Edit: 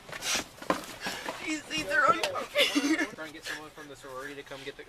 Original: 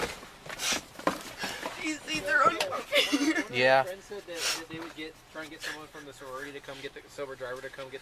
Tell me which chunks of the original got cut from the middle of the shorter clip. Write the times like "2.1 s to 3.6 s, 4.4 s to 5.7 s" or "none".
3.5 s to 5.3 s